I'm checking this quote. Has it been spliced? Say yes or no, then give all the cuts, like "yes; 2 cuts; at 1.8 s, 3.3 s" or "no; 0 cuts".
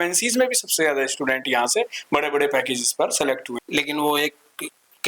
yes; 1 cut; at 3.5 s